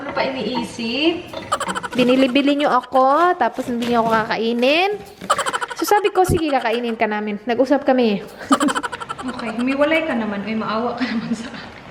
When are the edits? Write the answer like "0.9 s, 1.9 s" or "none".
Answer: 1.9 s, 8.8 s

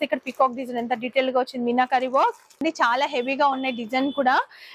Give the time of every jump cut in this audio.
2.6 s

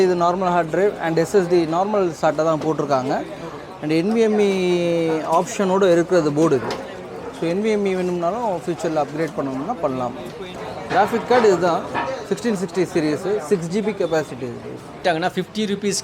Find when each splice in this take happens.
10.5 s, 15.0 s

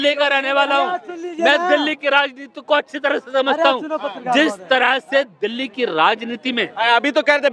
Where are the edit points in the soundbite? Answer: none

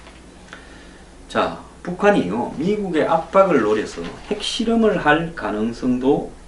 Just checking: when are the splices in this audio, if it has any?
3.0 s

